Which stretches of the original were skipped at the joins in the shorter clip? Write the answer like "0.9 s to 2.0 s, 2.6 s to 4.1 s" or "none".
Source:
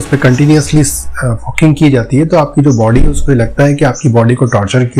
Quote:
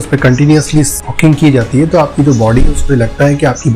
1.0 s to 1.4 s